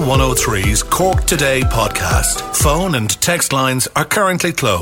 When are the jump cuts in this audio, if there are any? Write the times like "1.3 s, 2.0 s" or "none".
none